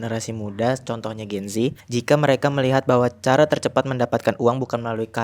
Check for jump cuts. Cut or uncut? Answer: cut